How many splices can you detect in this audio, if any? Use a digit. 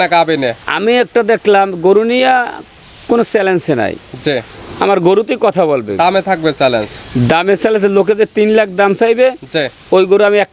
0